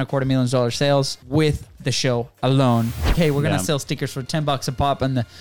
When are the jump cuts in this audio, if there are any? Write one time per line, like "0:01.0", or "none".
0:01.2
0:03.1